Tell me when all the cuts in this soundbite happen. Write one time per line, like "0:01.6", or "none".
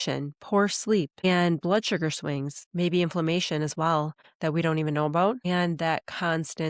0:01.2
0:02.6
0:04.2
0:05.4